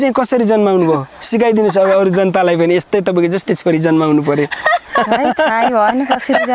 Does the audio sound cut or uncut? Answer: uncut